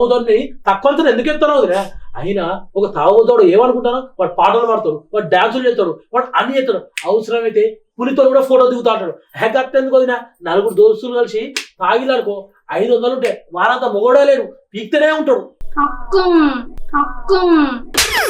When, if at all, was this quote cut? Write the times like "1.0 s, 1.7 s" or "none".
15.5 s